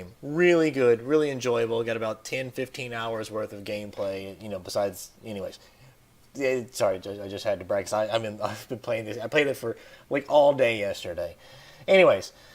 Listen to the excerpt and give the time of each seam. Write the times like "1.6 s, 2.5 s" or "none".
6.7 s